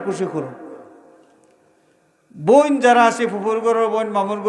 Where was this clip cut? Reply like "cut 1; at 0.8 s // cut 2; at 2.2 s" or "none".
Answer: none